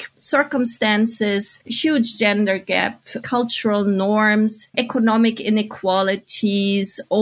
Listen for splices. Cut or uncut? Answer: cut